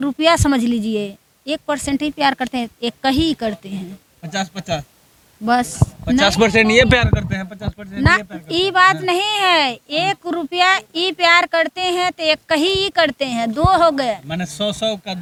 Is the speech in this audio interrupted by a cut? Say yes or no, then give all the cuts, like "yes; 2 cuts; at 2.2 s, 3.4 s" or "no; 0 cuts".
no; 0 cuts